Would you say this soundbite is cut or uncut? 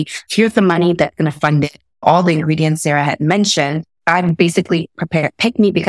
uncut